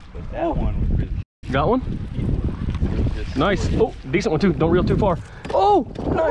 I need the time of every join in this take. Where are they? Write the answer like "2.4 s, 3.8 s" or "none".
2.7 s, 4.9 s

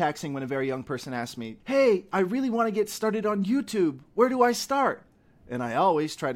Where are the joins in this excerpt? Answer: 1.5 s

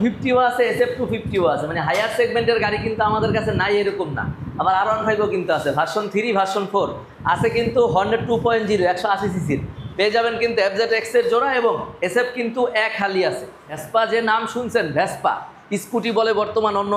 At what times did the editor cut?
13.8 s

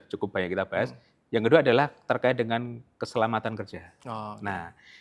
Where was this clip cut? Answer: none

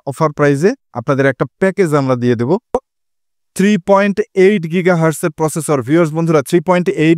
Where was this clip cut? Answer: 2.9 s

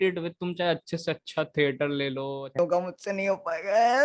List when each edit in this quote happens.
2.4 s

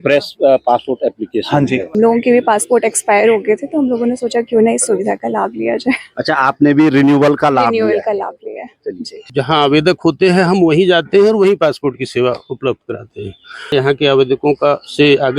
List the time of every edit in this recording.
1.9 s, 9.3 s, 13.7 s

